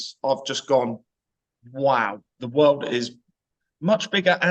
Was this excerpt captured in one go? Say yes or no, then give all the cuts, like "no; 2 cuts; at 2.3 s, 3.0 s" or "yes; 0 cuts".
no; 1 cut; at 2.4 s